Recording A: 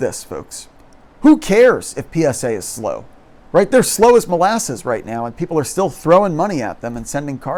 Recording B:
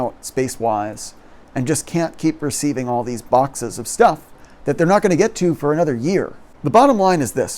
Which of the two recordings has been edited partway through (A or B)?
B